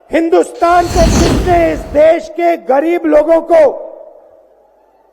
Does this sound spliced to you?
yes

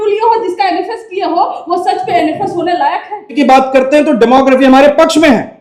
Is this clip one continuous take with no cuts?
no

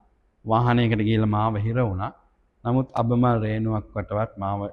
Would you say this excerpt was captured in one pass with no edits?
yes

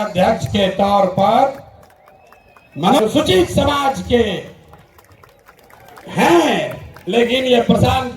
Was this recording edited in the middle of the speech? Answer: yes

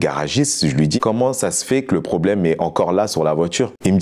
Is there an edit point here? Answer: yes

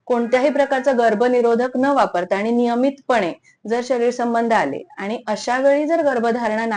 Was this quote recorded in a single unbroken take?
yes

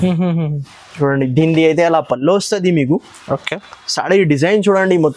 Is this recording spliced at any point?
no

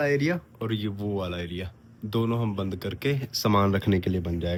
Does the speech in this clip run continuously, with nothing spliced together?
yes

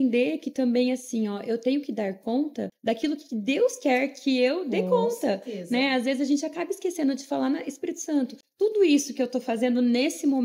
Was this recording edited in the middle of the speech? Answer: yes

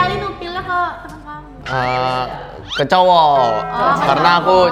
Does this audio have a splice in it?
no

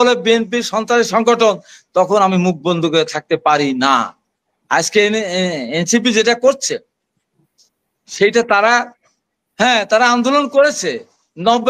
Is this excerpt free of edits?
yes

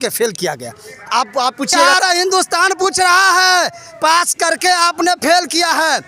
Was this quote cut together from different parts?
yes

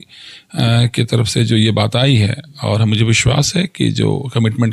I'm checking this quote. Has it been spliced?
no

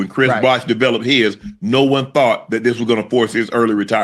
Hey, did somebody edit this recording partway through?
no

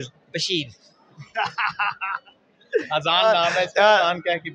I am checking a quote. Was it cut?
no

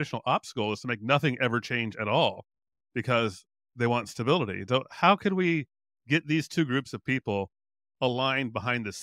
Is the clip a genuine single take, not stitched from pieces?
yes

